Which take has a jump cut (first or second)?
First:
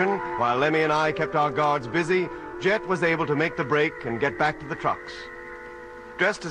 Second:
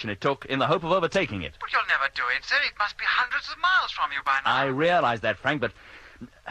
first